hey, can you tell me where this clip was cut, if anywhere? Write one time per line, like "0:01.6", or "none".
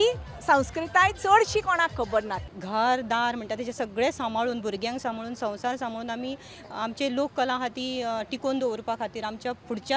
0:02.3